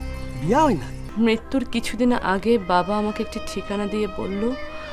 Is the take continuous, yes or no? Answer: no